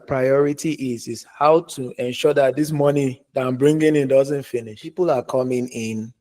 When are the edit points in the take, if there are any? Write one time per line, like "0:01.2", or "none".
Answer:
0:04.8